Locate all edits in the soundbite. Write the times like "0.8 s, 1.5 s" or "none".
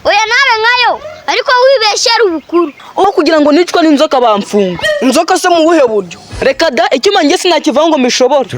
3.0 s